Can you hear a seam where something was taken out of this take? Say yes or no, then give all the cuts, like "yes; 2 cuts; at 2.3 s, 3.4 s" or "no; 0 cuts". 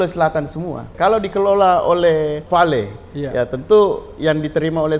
yes; 2 cuts; at 0.9 s, 2.4 s